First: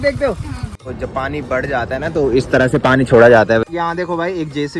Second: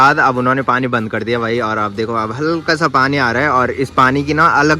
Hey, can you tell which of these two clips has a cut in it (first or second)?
first